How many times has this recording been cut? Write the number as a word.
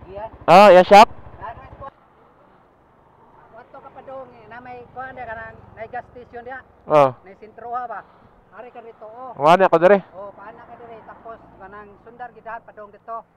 one